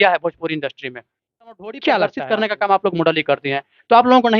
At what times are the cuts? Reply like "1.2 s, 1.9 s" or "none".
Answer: 2.2 s